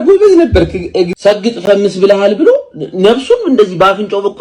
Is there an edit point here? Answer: yes; 1 cut; at 1.6 s

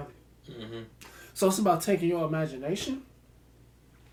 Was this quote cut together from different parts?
no; 0 cuts

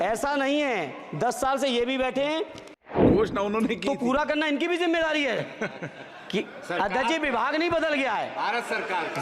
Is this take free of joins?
no; 1 cut; at 2.9 s

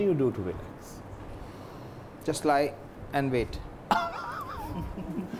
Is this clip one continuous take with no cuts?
yes; 0 cuts

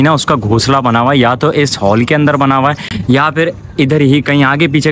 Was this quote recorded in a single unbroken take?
yes; 0 cuts

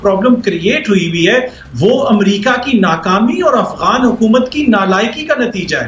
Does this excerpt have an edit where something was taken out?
no; 0 cuts

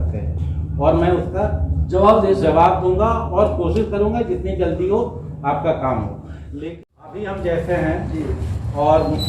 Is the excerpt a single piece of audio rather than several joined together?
no; 1 cut; at 6.6 s

